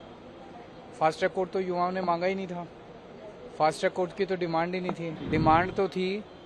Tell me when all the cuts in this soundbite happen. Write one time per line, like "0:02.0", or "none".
0:05.1